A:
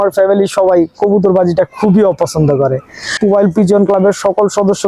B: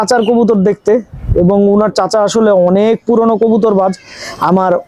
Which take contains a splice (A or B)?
A